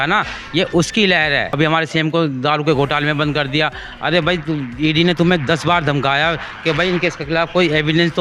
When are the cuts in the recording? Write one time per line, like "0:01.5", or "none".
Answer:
0:01.5